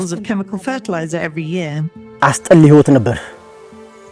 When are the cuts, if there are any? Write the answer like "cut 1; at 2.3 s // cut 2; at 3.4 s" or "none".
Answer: cut 1; at 2.0 s